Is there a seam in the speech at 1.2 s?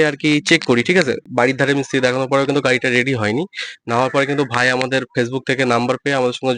yes; 1 cut; at 1.2 s

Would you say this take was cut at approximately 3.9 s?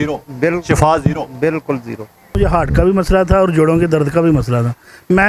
no; 1 cut; at 2.3 s

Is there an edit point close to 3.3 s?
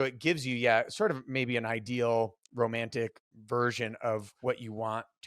yes; 2 cuts; at 3.3 s, 4.3 s

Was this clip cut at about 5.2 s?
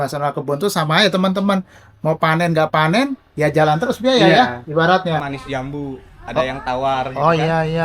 yes; 1 cut; at 5.2 s

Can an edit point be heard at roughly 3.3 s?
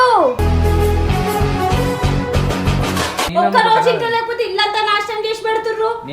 yes; 1 cut; at 3.3 s

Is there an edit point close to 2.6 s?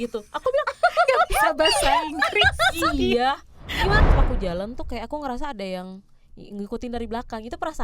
no; 1 cut; at 4.0 s

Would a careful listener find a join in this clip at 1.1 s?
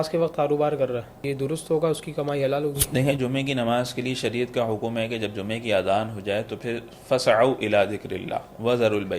yes; 1 cut; at 1.1 s

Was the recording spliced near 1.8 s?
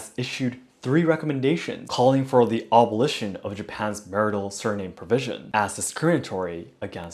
yes; 1 cut; at 1.8 s

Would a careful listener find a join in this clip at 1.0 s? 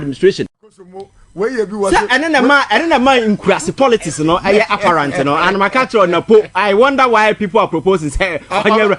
yes; 1 cut; at 1.0 s

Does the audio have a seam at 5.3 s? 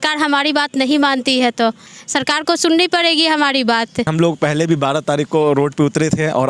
no; 2 cuts; at 1.9 s, 4.1 s

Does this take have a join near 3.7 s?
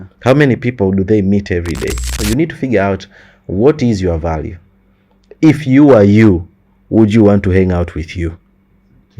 no; 1 cut; at 2.1 s

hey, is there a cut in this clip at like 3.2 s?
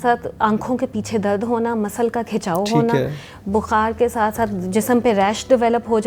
no; 0 cuts

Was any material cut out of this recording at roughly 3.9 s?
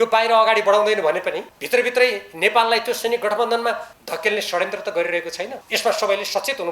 yes; 3 cuts; at 1.5 s, 3.9 s, 5.6 s

